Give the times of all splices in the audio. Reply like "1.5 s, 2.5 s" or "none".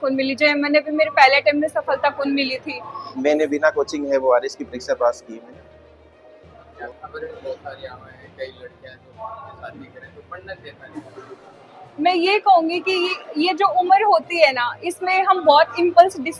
3.1 s, 6.8 s